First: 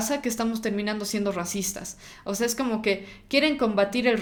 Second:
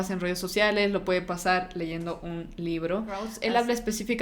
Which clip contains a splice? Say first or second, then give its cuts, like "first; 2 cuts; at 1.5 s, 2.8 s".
second; 1 cut; at 3.3 s